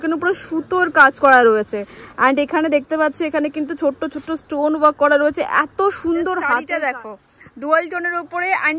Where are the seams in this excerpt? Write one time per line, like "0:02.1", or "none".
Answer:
0:06.6